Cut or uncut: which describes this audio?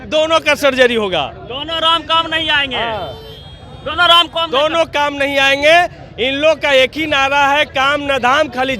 uncut